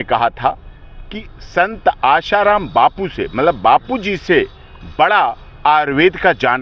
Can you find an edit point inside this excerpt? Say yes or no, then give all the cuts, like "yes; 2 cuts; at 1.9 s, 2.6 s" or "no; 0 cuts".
no; 0 cuts